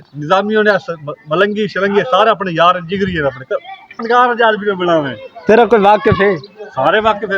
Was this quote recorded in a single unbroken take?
no; 1 cut; at 4.0 s

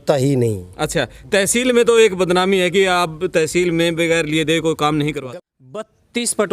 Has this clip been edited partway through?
yes; 1 cut; at 5.2 s

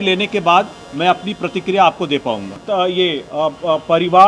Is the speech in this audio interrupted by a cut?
yes; 1 cut; at 2.5 s

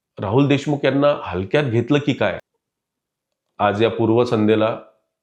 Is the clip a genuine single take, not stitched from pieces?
no; 1 cut; at 2.5 s

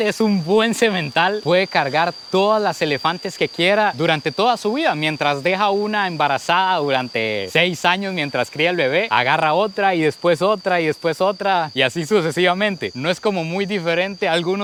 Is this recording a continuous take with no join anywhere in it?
yes; 0 cuts

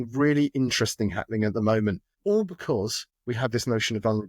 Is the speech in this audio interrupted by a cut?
yes; 2 cuts; at 2.1 s, 3.1 s

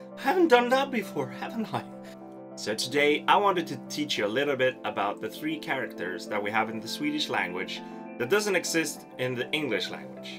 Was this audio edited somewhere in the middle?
yes; 1 cut; at 4.4 s

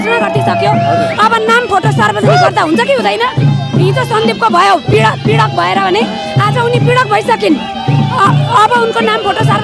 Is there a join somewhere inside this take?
no; 0 cuts

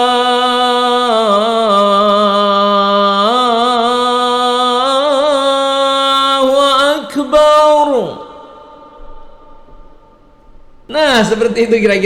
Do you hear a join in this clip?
yes; 1 cut; at 10.8 s

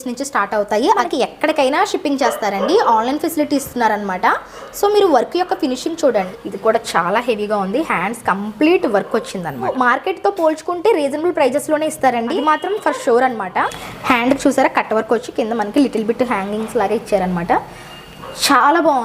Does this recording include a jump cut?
yes; 5 cuts; at 1.0 s, 6.3 s, 9.7 s, 12.3 s, 13.9 s

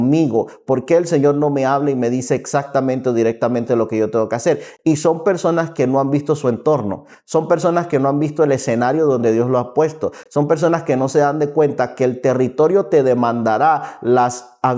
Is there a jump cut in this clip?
no; 0 cuts

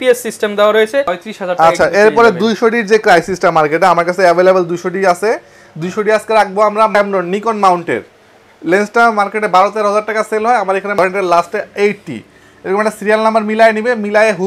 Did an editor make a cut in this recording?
yes; 3 cuts; at 1.1 s, 6.9 s, 11.0 s

